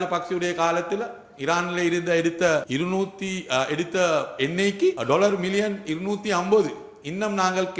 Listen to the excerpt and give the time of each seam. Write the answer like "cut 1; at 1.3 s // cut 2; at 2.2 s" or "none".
cut 1; at 2.7 s // cut 2; at 5.0 s